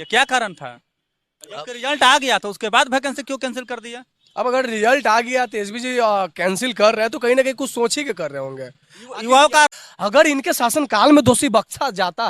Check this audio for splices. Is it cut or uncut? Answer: cut